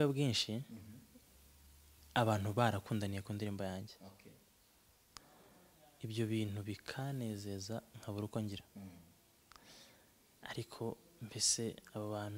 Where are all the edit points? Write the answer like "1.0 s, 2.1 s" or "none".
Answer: none